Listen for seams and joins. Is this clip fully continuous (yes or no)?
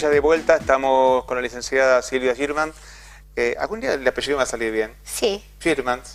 yes